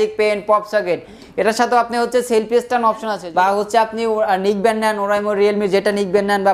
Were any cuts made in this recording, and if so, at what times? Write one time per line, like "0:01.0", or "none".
0:03.2